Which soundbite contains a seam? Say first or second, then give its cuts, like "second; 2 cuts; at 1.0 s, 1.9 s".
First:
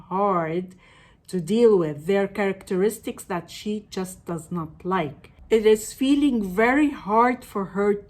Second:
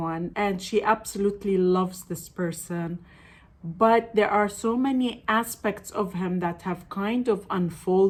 first; 1 cut; at 5.3 s